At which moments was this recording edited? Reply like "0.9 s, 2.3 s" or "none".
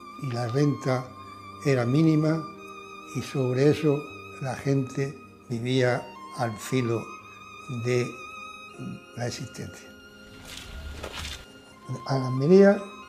6.4 s